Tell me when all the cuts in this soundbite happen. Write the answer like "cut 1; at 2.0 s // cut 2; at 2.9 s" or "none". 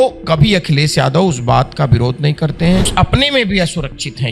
cut 1; at 2.9 s